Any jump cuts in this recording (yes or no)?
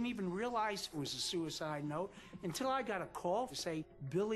yes